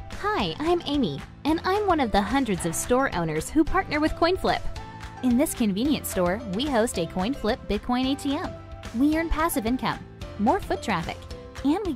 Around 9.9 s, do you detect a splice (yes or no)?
yes